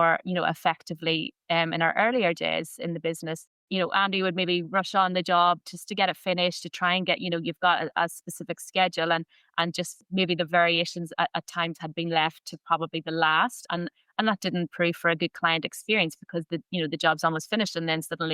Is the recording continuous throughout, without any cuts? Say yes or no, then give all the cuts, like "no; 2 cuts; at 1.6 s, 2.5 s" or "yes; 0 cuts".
no; 2 cuts; at 3.5 s, 10.0 s